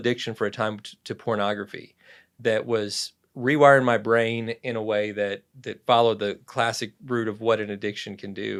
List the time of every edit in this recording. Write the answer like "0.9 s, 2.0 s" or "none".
none